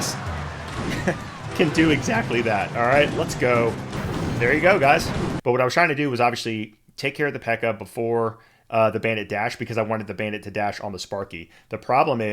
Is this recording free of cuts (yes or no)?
no